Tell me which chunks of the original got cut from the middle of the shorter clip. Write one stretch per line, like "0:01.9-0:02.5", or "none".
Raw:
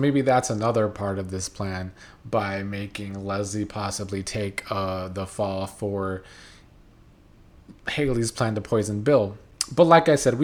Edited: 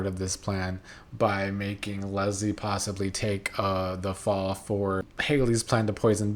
0:06.3-0:07.8

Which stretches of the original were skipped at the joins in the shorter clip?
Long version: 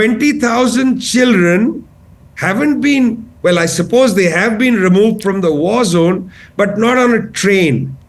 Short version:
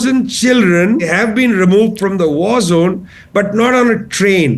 0:01.8-0:04.3

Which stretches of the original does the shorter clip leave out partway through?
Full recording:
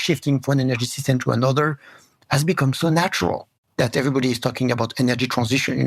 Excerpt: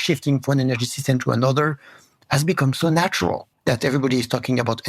0:03.5-0:03.6

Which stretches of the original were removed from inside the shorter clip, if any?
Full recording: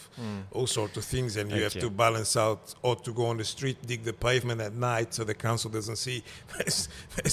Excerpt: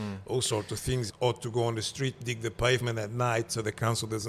0:01.3-0:02.7

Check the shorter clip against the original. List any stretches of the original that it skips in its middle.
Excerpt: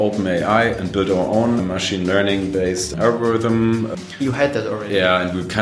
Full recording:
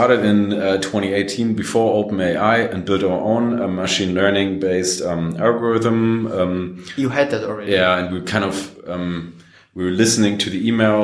0:03.5-0:03.7
0:05.0-0:05.3
0:06.3-0:06.7

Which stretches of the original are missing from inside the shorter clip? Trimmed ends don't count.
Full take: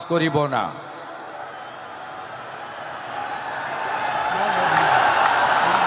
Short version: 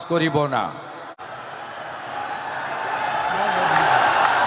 0:01.2-0:02.2

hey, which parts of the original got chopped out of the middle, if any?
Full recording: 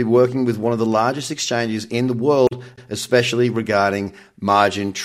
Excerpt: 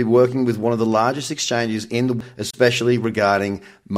0:02.2-0:02.7

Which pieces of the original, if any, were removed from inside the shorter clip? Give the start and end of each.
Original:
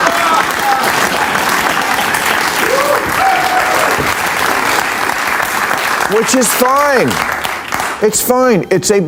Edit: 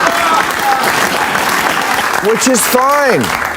0:02.0-0:05.9

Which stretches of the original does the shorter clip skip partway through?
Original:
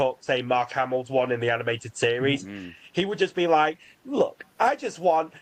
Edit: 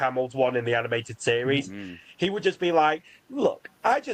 none

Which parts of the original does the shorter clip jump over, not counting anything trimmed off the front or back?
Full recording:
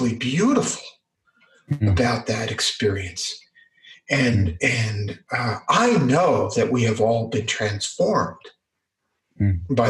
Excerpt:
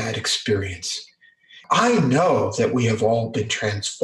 0:03.9-0:05.6

